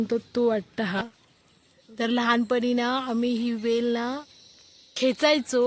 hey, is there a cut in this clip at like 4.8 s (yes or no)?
no